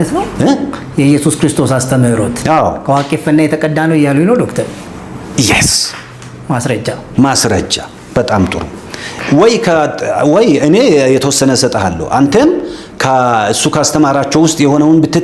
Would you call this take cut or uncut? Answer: uncut